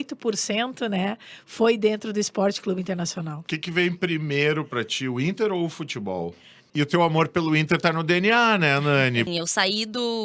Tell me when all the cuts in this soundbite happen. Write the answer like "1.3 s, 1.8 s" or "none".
6.5 s, 9.3 s